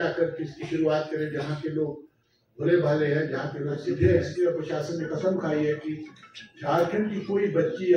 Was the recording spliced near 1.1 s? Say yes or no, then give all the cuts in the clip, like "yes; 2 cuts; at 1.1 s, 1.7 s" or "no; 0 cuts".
no; 1 cut; at 4.3 s